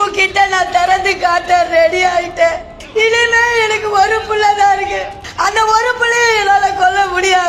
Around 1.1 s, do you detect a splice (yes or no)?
no